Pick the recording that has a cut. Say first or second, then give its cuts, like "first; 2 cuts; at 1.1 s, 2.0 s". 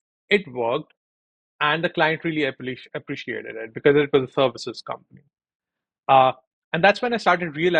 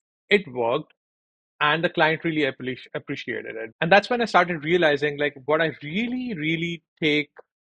second; 1 cut; at 3.6 s